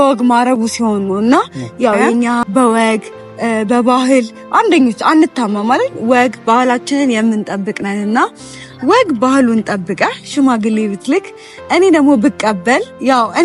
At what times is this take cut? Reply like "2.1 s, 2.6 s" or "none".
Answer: 2.4 s